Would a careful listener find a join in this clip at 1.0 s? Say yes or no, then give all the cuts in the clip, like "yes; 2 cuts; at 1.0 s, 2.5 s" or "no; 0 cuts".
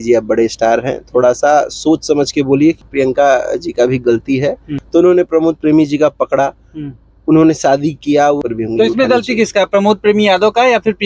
no; 3 cuts; at 2.8 s, 4.7 s, 8.4 s